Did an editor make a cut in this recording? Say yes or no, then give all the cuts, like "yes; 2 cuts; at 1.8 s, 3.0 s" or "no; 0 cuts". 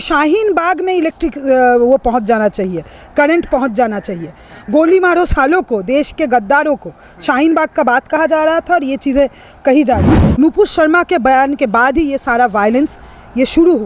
yes; 1 cut; at 10.2 s